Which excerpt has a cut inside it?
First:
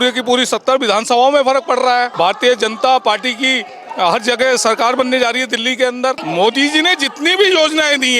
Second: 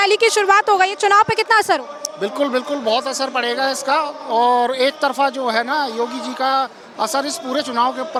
first; 2 cuts; at 2.1 s, 6.2 s

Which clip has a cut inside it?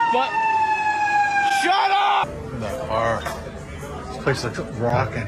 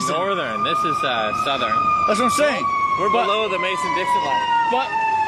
first; 1 cut; at 2.2 s

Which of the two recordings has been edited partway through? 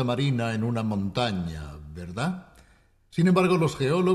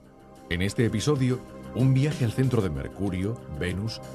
second; 1 cut; at 1.0 s

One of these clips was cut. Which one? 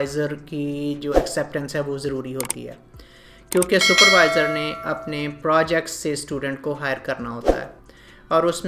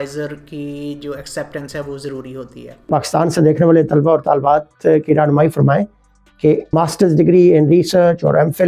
second; 2 cuts; at 2.9 s, 7.1 s

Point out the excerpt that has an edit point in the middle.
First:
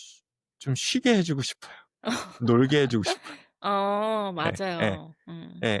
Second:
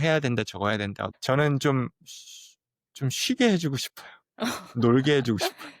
second; 1 cut; at 1.1 s

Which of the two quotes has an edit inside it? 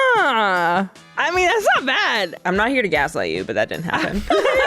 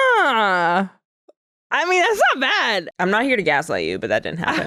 first; 1 cut; at 1.0 s

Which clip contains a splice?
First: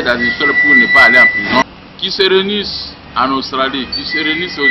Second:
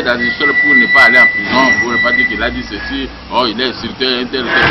first; 1 cut; at 1.6 s

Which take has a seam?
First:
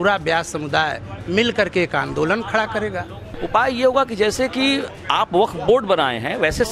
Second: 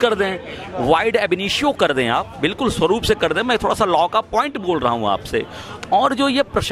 first; 1 cut; at 3.3 s

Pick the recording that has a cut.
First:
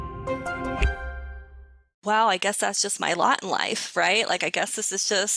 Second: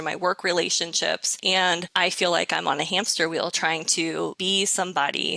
first; 1 cut; at 2.0 s

